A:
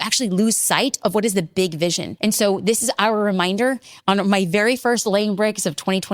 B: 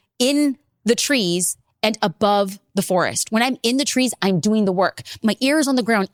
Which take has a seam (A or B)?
A